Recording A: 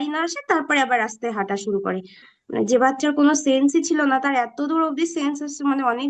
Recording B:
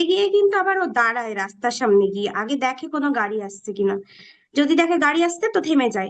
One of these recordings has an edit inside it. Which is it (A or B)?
A